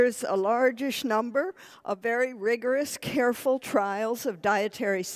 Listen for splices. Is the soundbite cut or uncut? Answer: cut